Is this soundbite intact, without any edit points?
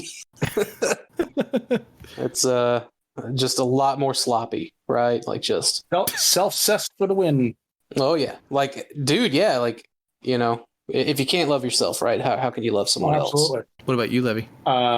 no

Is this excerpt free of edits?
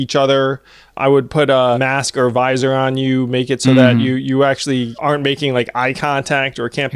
no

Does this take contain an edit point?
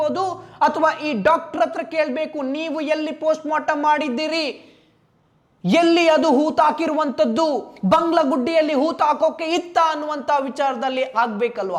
no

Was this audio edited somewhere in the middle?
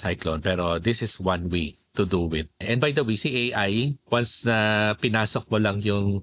yes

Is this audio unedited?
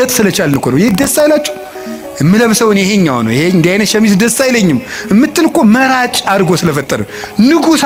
yes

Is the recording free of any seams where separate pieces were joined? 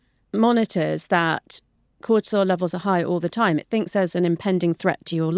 yes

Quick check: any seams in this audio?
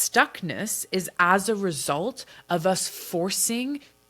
no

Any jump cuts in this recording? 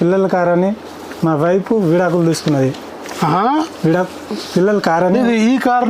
no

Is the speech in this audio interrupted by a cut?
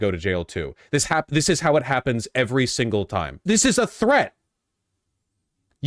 yes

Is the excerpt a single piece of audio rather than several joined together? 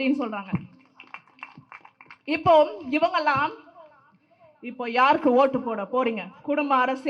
yes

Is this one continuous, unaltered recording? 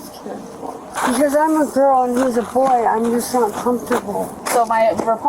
no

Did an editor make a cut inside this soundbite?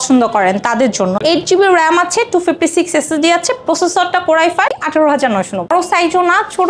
yes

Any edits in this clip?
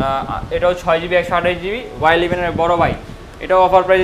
no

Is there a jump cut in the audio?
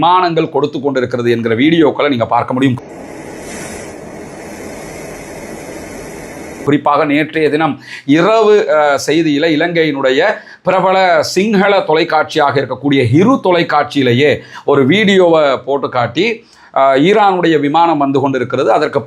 no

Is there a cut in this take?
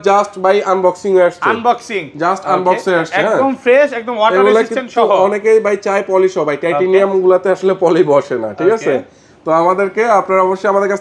no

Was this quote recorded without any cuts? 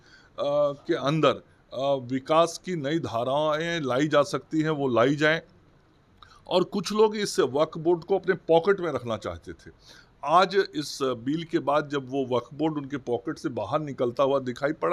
yes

